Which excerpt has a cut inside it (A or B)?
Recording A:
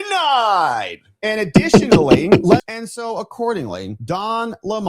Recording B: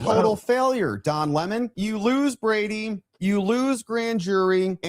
A